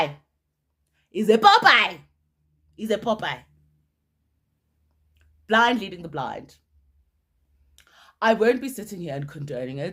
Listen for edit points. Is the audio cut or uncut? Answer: uncut